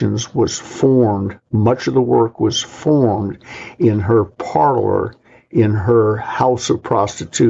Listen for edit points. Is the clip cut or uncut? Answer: uncut